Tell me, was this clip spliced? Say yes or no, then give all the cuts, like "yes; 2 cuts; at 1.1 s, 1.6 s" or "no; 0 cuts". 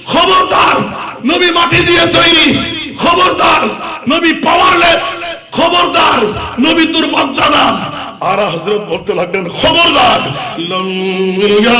yes; 1 cut; at 10.5 s